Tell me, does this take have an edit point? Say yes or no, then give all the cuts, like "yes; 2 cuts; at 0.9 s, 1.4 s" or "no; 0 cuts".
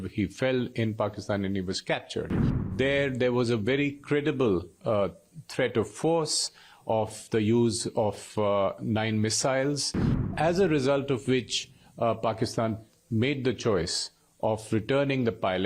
yes; 2 cuts; at 2.7 s, 10.3 s